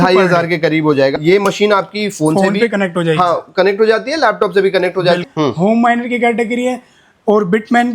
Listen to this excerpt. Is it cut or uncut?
cut